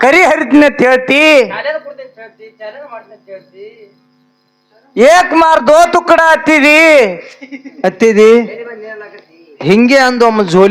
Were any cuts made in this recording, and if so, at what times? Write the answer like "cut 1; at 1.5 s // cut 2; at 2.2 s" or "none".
none